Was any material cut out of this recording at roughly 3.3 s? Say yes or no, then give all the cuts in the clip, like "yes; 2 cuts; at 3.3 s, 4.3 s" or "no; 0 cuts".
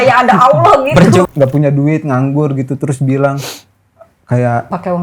no; 1 cut; at 1.3 s